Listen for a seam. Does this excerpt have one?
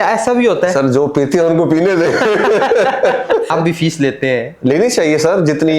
yes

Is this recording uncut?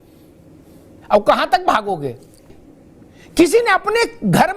no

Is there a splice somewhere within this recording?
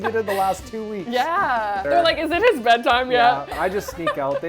yes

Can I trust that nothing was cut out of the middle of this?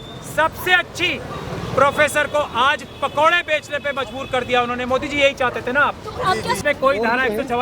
no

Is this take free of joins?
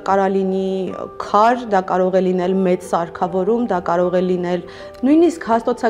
yes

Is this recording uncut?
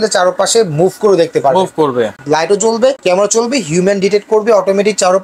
no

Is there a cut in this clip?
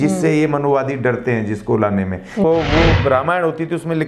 yes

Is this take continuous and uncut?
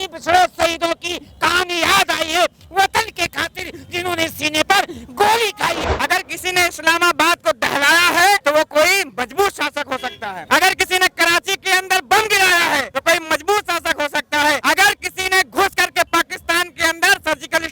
no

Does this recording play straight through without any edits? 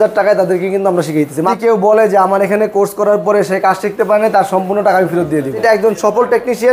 no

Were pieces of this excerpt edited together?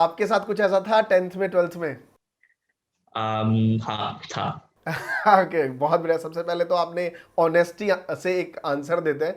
no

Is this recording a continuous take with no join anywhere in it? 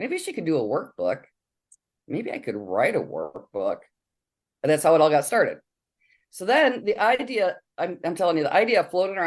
yes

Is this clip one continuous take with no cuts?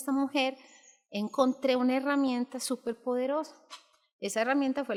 yes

